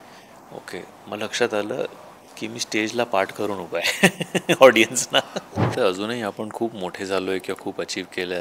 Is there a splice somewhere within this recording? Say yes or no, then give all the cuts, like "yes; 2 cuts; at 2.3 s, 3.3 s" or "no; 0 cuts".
yes; 1 cut; at 5.7 s